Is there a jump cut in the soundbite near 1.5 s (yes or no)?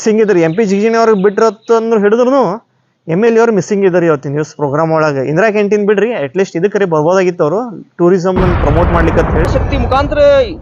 no